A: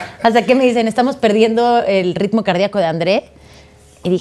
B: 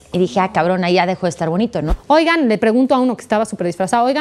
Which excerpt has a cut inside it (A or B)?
B